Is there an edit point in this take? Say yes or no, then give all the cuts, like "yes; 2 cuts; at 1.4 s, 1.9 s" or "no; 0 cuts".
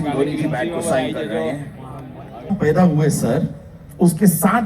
yes; 1 cut; at 2.5 s